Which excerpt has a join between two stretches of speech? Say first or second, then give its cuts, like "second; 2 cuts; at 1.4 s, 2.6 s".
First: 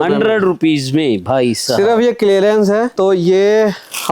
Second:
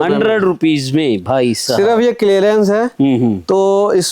first; 1 cut; at 2.9 s